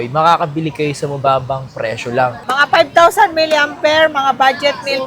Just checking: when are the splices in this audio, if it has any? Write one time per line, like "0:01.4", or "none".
0:02.4